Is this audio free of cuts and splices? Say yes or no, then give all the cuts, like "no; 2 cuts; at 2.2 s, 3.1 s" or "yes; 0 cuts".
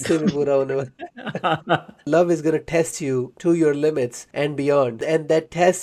no; 4 cuts; at 2.1 s, 3.3 s, 4.2 s, 5.0 s